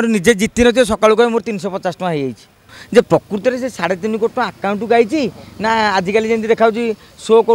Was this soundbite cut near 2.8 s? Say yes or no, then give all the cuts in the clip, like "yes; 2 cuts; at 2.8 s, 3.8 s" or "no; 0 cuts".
yes; 1 cut; at 2.8 s